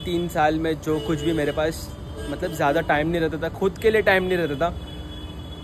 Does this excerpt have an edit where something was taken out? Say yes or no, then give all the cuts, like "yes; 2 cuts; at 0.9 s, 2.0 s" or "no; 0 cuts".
no; 0 cuts